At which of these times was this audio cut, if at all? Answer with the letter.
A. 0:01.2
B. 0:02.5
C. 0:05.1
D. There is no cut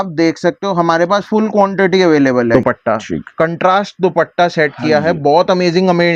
B